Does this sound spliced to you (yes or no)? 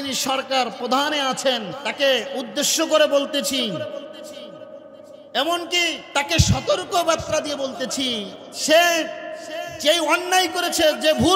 yes